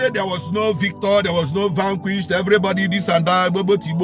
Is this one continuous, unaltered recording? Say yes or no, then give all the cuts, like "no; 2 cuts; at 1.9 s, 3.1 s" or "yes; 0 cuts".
yes; 0 cuts